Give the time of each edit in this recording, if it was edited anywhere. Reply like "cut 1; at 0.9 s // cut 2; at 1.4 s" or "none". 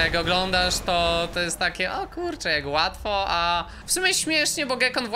cut 1; at 3.8 s